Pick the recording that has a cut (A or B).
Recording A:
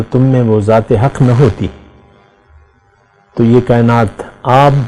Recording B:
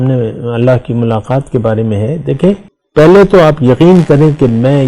B